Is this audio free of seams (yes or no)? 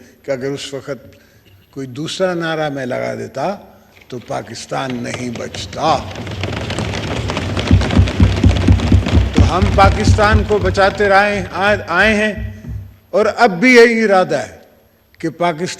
yes